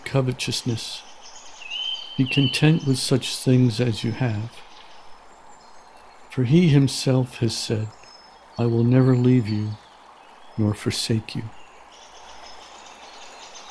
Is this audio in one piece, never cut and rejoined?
no; 1 cut; at 11.5 s

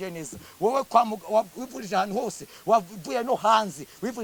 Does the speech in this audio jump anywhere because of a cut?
no; 0 cuts

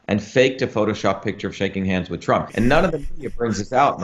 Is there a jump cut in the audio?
yes; 1 cut; at 2.5 s

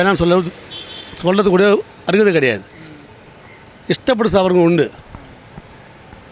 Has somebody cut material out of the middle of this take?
no; 0 cuts

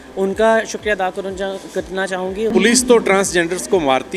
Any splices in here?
yes; 1 cut; at 2.5 s

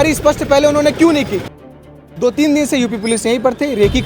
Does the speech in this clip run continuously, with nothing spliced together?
no; 1 cut; at 1.9 s

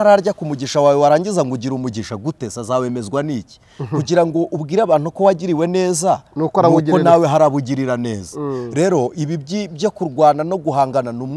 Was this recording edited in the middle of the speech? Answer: no; 0 cuts

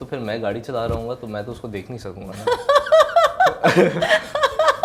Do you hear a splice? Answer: no; 0 cuts

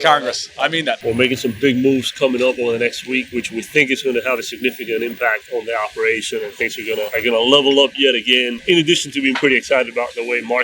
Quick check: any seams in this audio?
yes; 4 cuts; at 0.9 s, 3.3 s, 7.1 s, 8.6 s

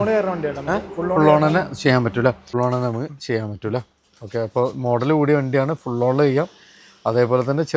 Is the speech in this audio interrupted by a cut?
yes; 1 cut; at 2.5 s

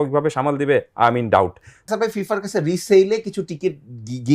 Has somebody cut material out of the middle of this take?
yes; 1 cut; at 1.9 s

